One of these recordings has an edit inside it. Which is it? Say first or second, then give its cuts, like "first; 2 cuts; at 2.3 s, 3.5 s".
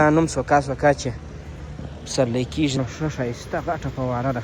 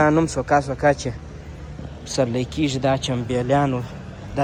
first; 1 cut; at 2.8 s